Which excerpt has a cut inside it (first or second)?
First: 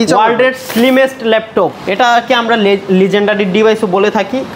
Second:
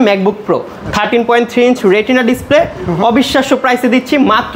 first